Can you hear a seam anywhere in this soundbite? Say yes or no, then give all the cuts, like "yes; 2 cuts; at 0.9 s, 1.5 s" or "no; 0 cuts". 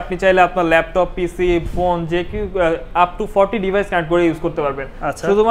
no; 0 cuts